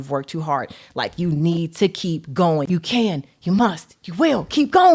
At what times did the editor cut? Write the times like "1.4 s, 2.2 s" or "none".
2.7 s